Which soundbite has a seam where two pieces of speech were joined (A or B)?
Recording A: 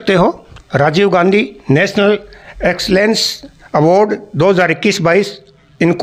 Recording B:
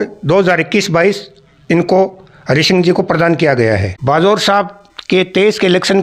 B